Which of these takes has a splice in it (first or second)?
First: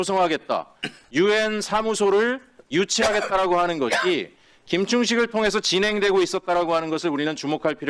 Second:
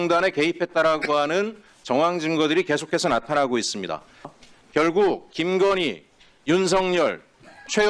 second